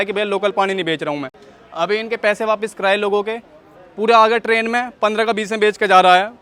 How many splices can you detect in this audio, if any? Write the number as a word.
zero